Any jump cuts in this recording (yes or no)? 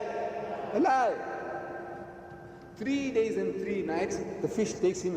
yes